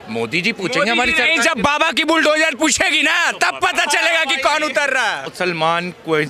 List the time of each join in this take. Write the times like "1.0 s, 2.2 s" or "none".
5.2 s